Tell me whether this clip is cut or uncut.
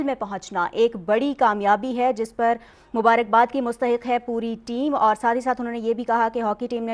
uncut